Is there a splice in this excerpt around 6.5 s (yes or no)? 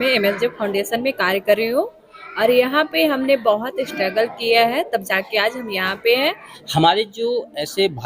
yes